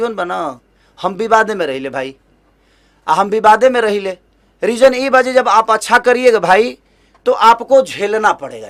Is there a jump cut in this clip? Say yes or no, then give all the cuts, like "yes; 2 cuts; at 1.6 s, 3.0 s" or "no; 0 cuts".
no; 0 cuts